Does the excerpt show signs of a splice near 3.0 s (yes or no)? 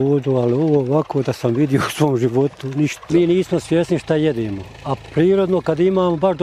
yes